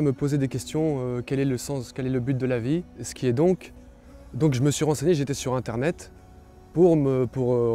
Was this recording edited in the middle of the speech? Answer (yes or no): yes